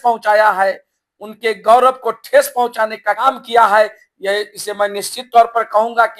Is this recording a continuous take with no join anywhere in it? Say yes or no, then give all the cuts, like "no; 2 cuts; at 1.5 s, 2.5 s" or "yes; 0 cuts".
yes; 0 cuts